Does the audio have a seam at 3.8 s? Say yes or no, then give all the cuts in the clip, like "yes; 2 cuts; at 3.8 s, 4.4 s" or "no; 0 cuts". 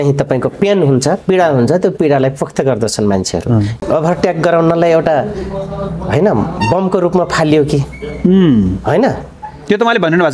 yes; 1 cut; at 3.8 s